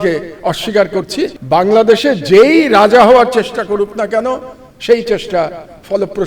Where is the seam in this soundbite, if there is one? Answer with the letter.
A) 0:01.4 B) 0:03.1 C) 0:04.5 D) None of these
A